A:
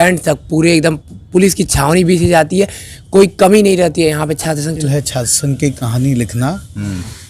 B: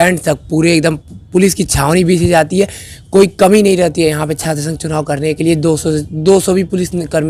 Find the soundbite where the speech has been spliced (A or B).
A